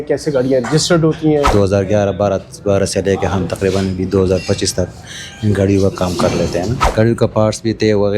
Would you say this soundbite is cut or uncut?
cut